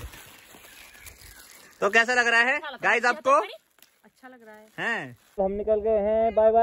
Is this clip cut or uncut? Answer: cut